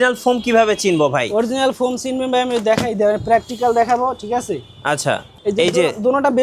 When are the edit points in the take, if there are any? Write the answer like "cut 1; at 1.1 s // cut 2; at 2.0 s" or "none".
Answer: none